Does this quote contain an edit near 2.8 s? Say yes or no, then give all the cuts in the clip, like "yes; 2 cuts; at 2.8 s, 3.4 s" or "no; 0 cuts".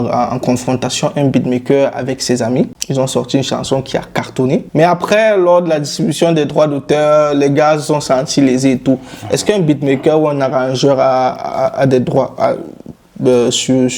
yes; 2 cuts; at 2.8 s, 4.7 s